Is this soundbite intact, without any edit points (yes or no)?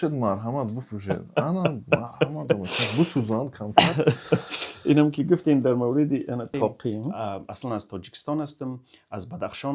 no